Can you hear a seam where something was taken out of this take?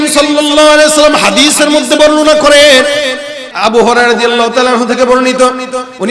yes; 1 cut; at 3.4 s

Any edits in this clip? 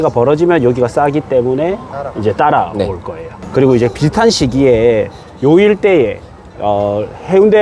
no; 0 cuts

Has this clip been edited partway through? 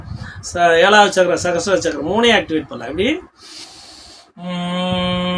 no; 0 cuts

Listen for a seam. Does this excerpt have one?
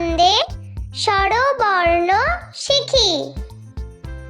yes; 1 cut; at 3.3 s

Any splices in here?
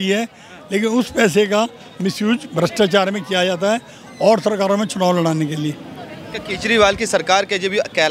no; 0 cuts

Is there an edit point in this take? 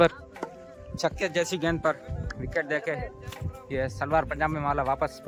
no; 0 cuts

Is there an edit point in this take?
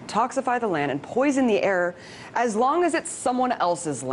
no; 0 cuts

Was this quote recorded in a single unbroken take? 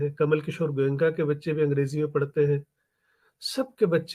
yes; 0 cuts

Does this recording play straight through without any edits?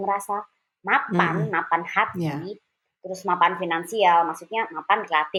yes; 0 cuts

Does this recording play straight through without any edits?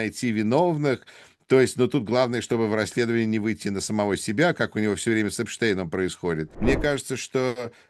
no; 1 cut; at 6.5 s

